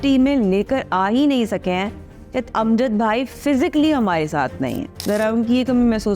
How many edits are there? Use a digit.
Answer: 1